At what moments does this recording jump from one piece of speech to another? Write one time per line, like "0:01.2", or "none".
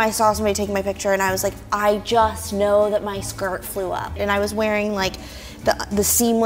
0:04.2